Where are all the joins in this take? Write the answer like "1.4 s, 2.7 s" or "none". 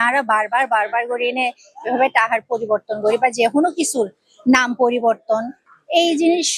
none